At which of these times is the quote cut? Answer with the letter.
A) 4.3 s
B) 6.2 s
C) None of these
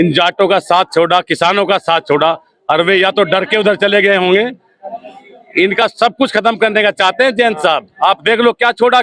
C